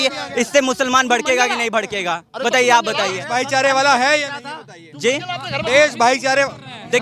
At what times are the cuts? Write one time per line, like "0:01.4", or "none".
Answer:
none